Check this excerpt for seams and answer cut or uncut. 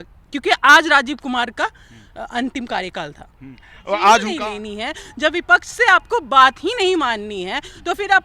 cut